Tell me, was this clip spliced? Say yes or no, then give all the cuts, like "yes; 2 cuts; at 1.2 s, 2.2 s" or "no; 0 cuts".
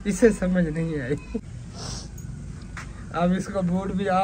yes; 1 cut; at 1.5 s